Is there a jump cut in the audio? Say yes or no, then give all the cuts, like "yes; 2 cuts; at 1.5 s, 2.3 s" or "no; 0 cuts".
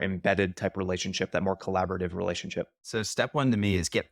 yes; 1 cut; at 2.8 s